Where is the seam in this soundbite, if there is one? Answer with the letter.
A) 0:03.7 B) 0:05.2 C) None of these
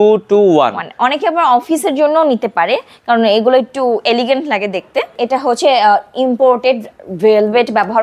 B